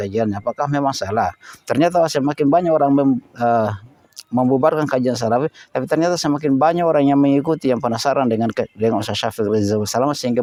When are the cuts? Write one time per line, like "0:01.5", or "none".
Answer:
none